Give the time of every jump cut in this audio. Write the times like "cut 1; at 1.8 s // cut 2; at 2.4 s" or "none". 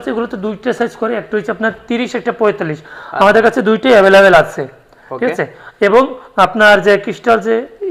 none